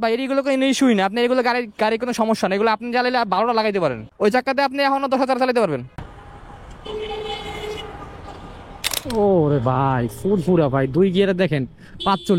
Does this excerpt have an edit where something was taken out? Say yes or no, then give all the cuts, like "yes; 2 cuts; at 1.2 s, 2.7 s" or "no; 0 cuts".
yes; 1 cut; at 9.0 s